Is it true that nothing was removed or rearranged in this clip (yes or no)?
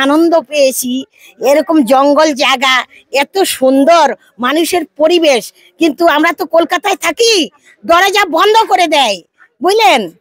yes